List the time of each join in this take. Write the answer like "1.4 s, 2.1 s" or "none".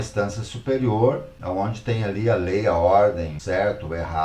1.3 s, 3.4 s